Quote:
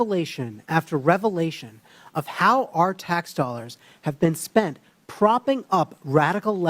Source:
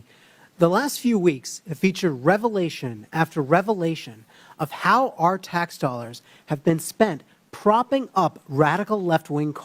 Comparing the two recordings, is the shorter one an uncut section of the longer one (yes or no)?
yes